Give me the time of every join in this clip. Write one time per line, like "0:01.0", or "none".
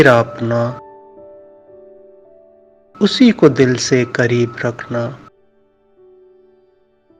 0:01.2
0:02.9

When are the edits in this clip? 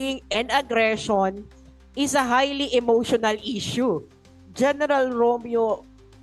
0:04.4

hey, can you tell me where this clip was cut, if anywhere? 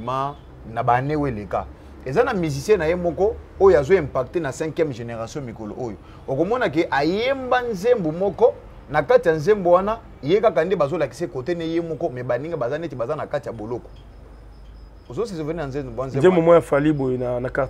none

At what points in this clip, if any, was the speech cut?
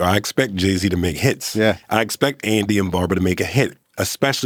none

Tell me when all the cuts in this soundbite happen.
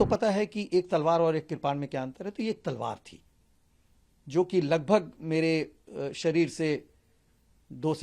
none

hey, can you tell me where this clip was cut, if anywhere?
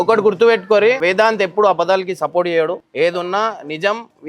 0:01.0
0:02.8

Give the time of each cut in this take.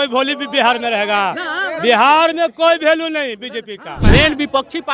0:04.0

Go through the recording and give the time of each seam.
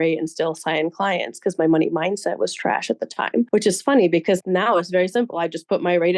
none

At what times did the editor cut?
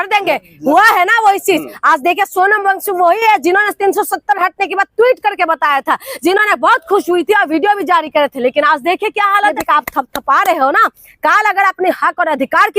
0:09.6

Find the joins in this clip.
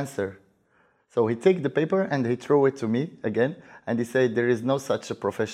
none

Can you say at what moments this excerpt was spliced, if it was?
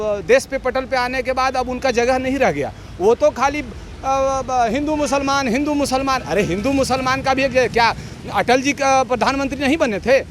none

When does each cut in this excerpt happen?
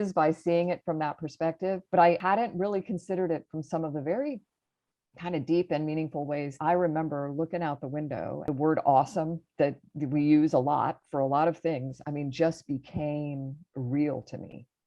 0:06.6

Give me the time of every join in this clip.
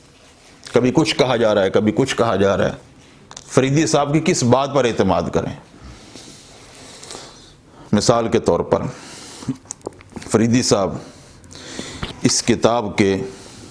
none

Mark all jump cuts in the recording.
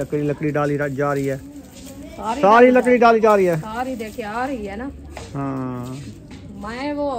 none

